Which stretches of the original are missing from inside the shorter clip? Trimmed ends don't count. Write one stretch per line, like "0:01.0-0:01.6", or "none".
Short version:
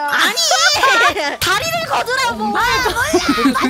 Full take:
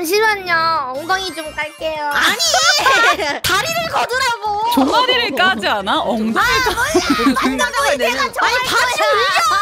0:04.6-0:06.4